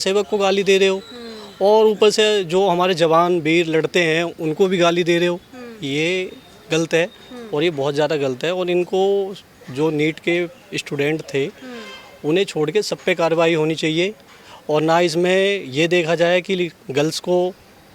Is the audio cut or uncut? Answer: uncut